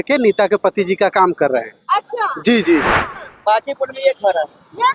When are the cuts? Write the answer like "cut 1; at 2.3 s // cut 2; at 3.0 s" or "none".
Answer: cut 1; at 3.1 s